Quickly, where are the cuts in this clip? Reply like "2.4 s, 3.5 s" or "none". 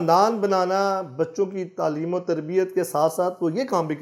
none